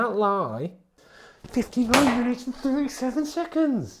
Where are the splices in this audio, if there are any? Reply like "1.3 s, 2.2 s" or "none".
0.9 s